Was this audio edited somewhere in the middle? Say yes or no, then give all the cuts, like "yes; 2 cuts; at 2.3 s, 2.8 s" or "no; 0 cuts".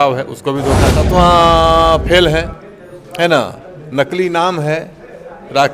yes; 1 cut; at 1.1 s